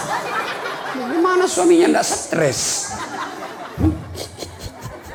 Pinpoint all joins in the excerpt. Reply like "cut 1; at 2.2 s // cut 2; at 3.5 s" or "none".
none